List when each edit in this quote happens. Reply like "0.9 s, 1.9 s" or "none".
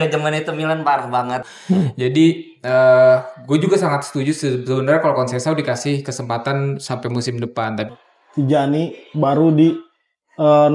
1.5 s, 7.9 s